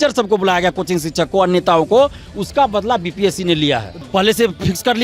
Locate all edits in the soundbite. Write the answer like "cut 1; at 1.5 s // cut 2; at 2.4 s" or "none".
cut 1; at 3.9 s